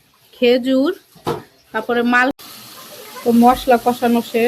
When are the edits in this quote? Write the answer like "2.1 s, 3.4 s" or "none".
2.4 s